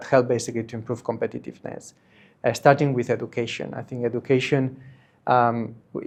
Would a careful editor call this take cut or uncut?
uncut